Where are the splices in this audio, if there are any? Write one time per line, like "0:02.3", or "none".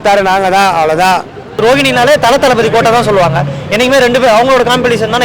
0:01.6